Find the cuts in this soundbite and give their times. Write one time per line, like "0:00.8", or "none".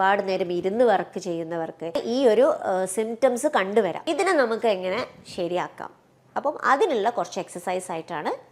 0:02.0
0:04.0